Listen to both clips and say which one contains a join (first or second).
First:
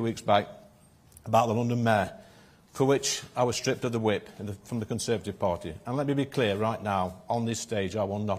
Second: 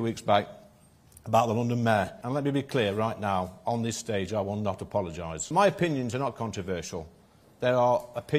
second